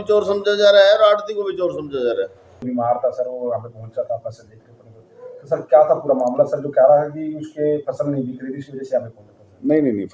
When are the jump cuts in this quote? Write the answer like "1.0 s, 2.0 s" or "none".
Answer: 2.6 s